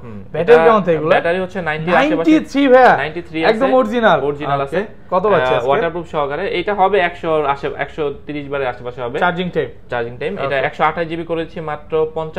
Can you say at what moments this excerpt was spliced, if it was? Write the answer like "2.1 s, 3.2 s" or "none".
none